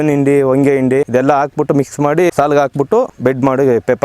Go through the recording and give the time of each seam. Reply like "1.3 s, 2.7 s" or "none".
1.1 s, 2.3 s, 3.1 s